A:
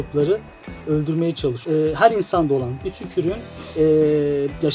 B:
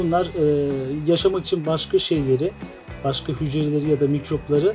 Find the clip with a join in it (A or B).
A